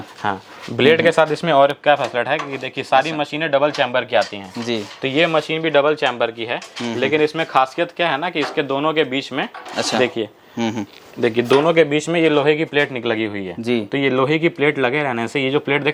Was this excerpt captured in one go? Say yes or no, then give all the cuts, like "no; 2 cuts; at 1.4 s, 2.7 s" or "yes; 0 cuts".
yes; 0 cuts